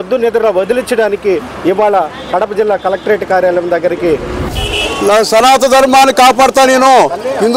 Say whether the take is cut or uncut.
cut